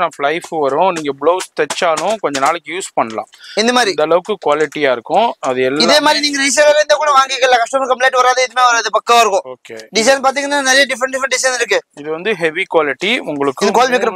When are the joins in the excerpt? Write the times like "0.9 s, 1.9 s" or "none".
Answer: none